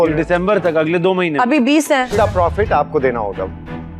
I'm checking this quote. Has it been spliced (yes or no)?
yes